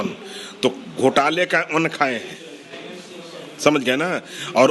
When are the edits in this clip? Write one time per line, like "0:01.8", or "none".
none

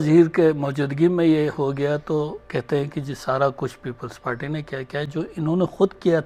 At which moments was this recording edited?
none

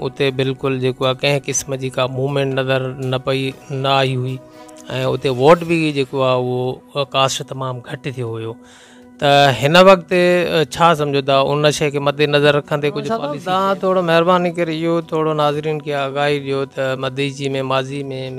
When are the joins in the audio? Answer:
0:13.3

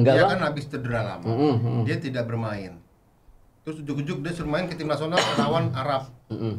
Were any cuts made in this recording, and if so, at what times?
none

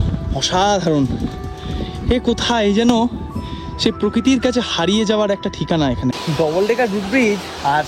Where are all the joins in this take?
0:06.2

